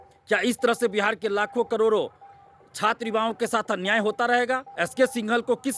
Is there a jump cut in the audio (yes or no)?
yes